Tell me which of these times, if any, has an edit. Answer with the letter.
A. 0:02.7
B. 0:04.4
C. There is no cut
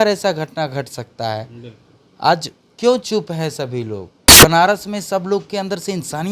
B